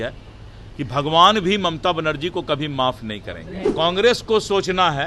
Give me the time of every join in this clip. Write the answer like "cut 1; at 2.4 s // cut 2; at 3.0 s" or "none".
cut 1; at 3.5 s

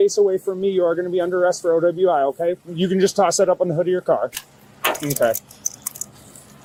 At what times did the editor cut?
none

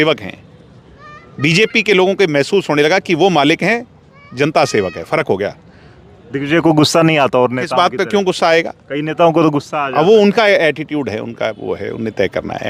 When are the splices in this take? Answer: none

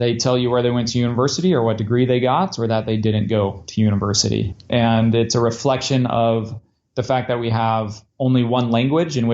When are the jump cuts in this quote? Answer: cut 1; at 4.6 s

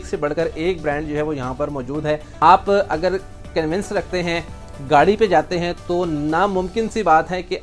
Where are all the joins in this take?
cut 1; at 2.4 s

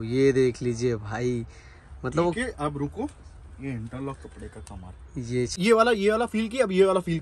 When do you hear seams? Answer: cut 1; at 5.5 s

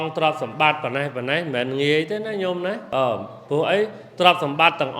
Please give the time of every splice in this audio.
cut 1; at 2.8 s

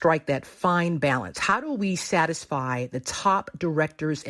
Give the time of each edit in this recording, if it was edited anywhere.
none

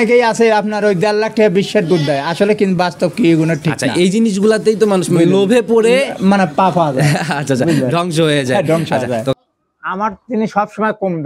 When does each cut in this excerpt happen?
cut 1; at 9.3 s

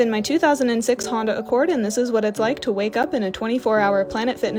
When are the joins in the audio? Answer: none

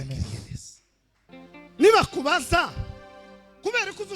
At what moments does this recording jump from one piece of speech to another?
cut 1; at 1.2 s

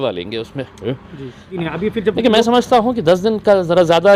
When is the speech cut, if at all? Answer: cut 1; at 1.6 s

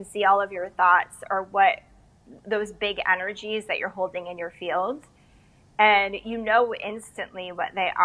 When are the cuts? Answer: none

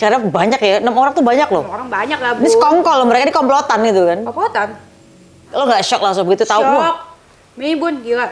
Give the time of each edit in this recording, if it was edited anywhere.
cut 1; at 5.5 s

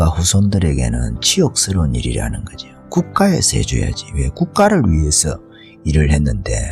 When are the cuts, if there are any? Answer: none

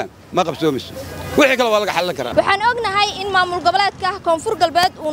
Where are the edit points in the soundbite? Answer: none

